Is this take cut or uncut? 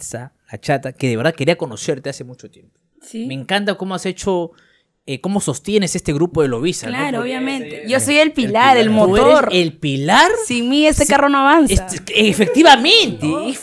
uncut